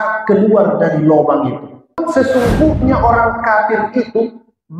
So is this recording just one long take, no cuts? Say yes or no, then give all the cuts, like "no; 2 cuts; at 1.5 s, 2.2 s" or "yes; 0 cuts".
no; 1 cut; at 1.9 s